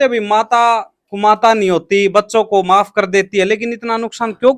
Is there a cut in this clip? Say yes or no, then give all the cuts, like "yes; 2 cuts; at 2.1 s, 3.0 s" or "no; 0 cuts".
no; 0 cuts